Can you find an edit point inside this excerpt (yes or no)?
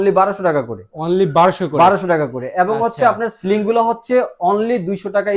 no